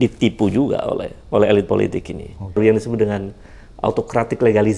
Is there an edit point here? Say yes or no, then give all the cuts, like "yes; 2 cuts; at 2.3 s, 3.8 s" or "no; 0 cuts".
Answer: yes; 1 cut; at 2.6 s